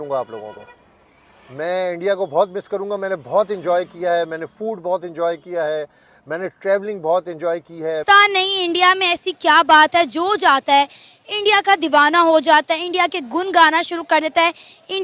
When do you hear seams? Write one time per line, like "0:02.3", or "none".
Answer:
0:08.1